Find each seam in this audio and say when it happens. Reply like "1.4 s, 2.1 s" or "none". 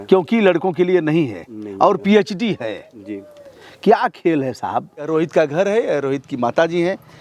5.1 s